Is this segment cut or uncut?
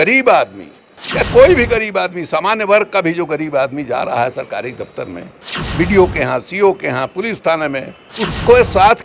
cut